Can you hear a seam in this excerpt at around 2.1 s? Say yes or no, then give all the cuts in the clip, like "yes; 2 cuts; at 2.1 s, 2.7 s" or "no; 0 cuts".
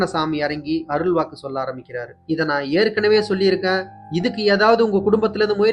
yes; 1 cut; at 2.1 s